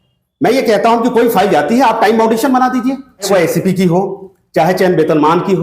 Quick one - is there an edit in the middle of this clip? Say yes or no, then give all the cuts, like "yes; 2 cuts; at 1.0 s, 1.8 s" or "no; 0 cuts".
yes; 1 cut; at 3.3 s